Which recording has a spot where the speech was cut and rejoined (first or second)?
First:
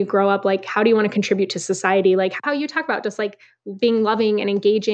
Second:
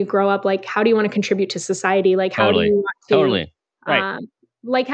first